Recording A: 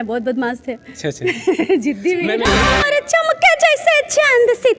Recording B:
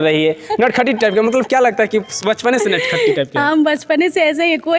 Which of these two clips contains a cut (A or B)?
A